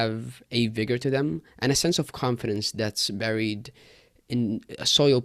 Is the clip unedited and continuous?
yes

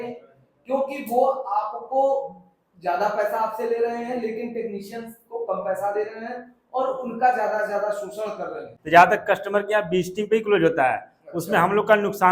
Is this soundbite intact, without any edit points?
no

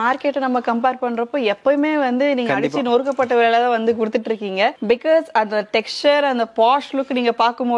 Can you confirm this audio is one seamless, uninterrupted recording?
yes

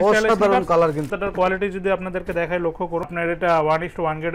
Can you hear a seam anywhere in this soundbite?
yes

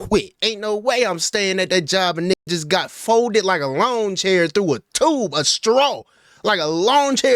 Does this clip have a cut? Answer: no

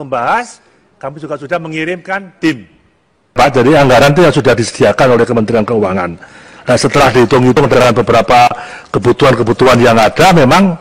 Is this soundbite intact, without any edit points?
no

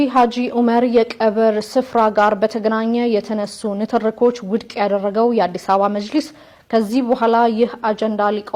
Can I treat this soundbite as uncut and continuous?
yes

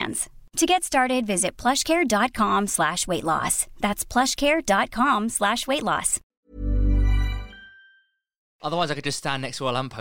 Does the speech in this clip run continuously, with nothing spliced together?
no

